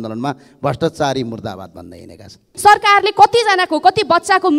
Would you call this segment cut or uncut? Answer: cut